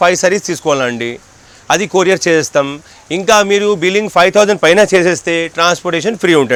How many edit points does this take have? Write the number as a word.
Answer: zero